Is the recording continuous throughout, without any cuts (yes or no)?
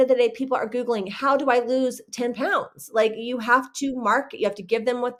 yes